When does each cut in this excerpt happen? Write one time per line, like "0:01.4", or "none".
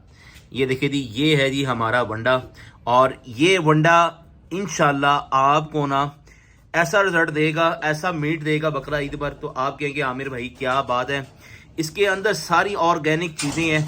none